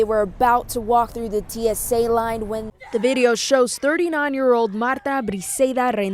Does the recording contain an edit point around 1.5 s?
no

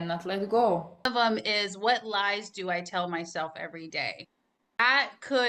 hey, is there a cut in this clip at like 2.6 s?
no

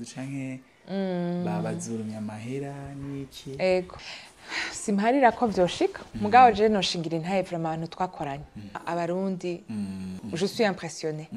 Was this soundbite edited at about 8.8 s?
yes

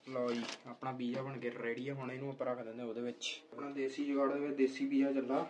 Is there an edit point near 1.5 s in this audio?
no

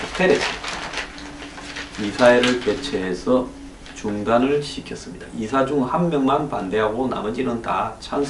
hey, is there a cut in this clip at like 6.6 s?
no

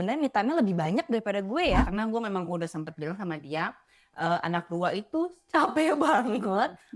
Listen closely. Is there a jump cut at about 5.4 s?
no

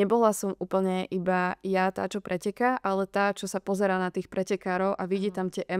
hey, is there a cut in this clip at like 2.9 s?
no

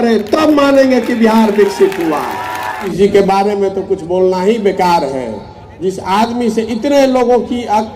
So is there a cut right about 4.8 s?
no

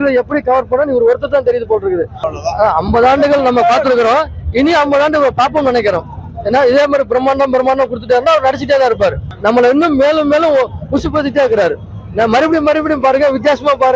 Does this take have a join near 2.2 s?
yes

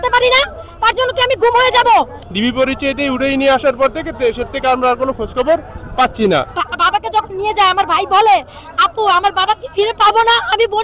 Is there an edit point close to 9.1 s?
no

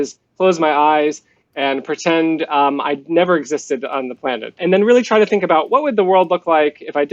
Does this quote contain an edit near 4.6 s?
yes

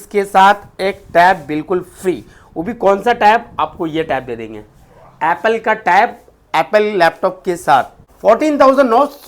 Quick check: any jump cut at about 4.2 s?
no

